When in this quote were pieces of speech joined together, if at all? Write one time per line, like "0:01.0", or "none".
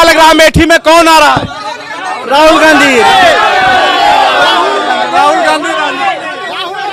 none